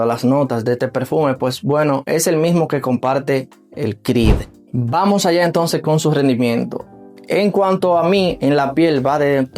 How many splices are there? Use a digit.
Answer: 1